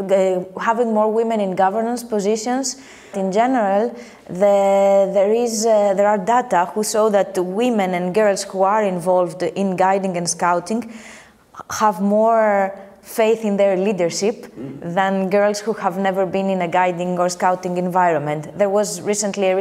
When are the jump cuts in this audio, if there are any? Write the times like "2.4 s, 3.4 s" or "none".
3.1 s